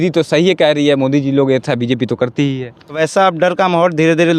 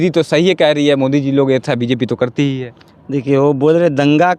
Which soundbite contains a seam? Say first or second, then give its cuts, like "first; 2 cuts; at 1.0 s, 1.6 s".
first; 1 cut; at 3.0 s